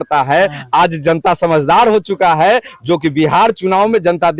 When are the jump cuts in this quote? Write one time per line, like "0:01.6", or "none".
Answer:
none

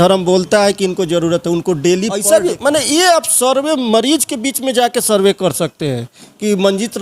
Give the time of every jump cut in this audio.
0:02.2

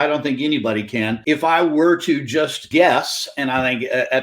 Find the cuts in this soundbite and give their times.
0:01.2
0:02.6

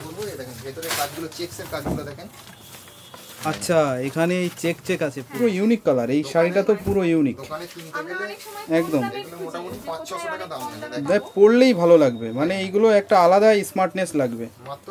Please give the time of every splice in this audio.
0:05.2

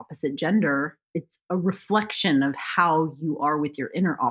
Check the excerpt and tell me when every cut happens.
0:01.0

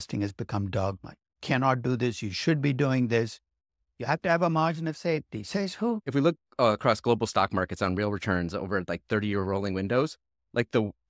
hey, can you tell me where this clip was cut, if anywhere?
0:06.0

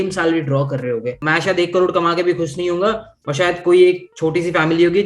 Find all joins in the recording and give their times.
0:01.2

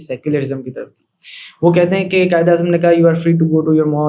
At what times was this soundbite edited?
none

